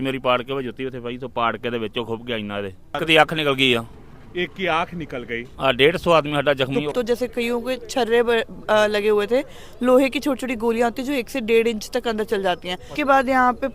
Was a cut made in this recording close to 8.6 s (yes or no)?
no